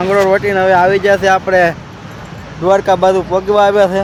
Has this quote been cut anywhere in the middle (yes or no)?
no